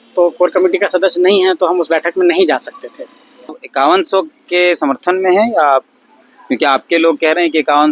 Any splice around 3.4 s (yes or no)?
yes